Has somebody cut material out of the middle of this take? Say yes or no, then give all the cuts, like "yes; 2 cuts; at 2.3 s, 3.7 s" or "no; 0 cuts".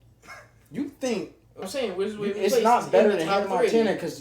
yes; 1 cut; at 1.6 s